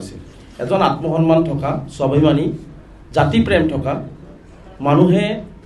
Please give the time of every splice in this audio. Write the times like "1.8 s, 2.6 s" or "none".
none